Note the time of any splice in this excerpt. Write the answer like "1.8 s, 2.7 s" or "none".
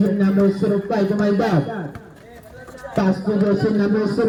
none

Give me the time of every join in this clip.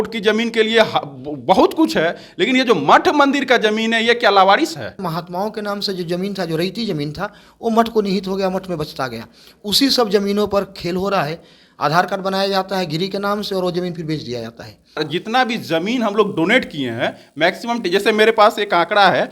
5.1 s, 15.0 s

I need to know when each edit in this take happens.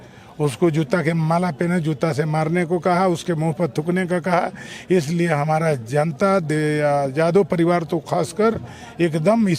none

